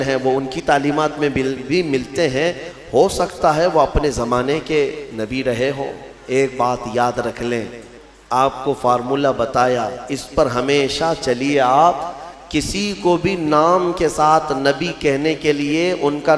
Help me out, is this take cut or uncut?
cut